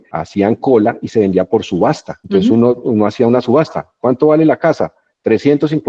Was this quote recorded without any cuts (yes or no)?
yes